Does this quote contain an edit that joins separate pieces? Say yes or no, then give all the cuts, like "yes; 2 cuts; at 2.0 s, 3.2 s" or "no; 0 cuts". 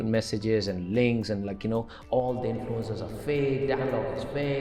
no; 0 cuts